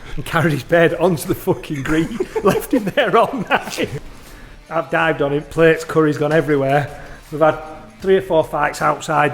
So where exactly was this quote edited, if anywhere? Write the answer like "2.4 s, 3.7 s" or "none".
4.0 s